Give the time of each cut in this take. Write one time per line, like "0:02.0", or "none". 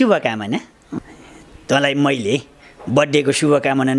0:01.0